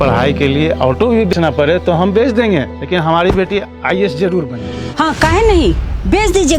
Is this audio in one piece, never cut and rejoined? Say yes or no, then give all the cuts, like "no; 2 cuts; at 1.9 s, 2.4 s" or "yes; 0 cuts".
no; 2 cuts; at 1.3 s, 4.8 s